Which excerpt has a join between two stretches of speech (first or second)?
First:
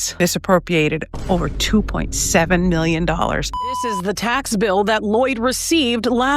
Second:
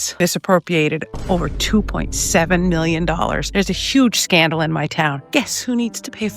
first